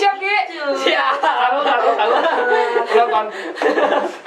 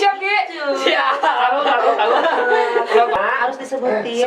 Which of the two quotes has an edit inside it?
second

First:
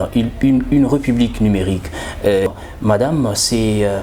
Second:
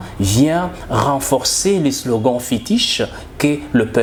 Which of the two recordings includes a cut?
first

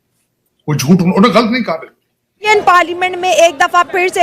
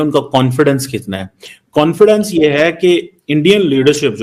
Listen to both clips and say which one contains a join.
first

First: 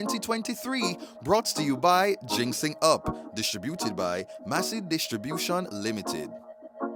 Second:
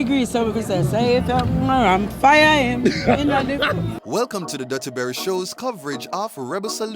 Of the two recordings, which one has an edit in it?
second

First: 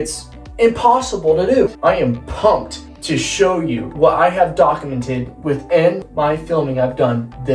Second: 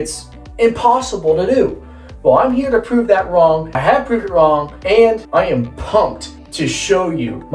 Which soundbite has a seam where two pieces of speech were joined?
first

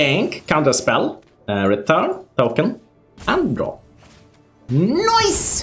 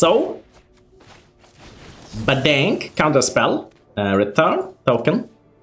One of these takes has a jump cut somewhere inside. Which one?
first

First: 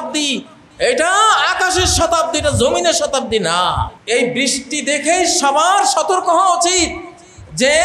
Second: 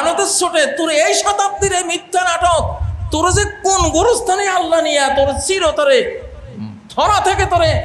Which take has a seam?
first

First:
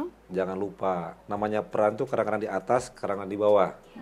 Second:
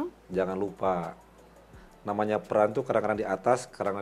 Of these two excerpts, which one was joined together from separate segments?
first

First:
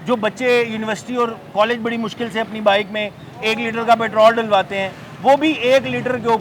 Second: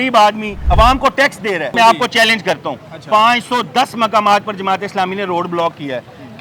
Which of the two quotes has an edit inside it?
second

